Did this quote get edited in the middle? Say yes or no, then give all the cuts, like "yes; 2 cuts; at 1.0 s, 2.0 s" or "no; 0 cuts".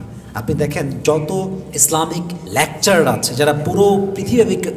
yes; 1 cut; at 2.4 s